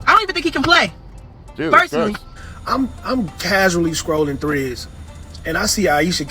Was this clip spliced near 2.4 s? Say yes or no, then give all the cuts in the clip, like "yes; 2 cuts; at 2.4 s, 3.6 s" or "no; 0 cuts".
yes; 1 cut; at 2.4 s